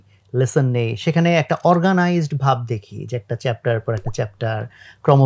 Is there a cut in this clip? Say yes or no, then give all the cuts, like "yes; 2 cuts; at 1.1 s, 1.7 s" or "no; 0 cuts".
no; 0 cuts